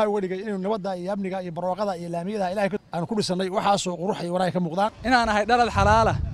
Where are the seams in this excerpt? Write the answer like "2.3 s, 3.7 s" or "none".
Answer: 2.8 s, 5.0 s